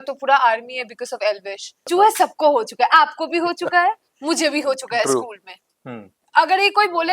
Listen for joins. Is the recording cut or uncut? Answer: cut